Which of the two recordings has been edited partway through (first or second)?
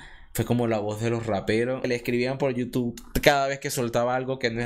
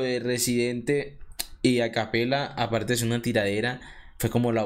first